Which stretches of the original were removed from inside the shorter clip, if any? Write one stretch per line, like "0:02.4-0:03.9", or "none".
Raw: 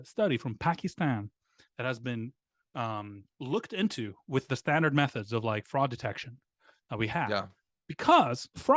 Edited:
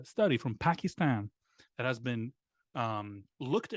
none